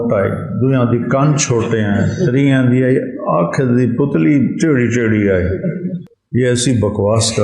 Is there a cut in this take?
yes; 1 cut; at 6.1 s

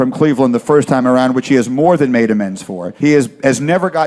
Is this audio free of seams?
no; 1 cut; at 3.0 s

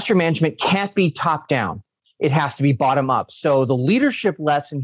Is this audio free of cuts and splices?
yes; 0 cuts

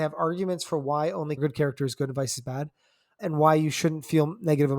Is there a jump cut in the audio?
yes; 2 cuts; at 1.4 s, 3.1 s

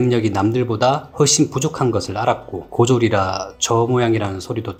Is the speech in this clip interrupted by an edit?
no; 0 cuts

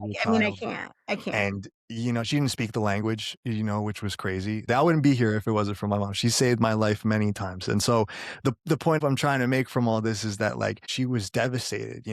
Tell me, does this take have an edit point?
yes; 3 cuts; at 4.6 s, 9.0 s, 10.9 s

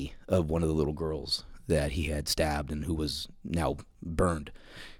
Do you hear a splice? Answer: yes; 1 cut; at 3.9 s

